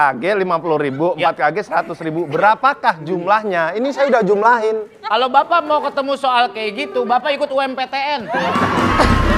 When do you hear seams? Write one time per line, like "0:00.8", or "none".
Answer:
none